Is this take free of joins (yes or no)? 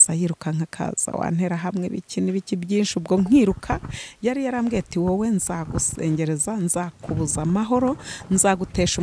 yes